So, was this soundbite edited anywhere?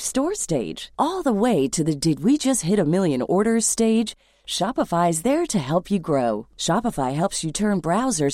no; 0 cuts

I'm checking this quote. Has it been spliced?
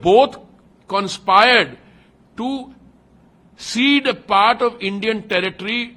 no; 0 cuts

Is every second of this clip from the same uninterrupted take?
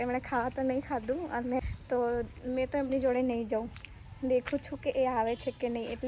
no; 1 cut; at 1.6 s

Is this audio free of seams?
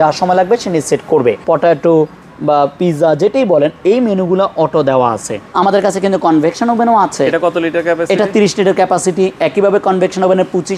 no; 2 cuts; at 1.4 s, 5.4 s

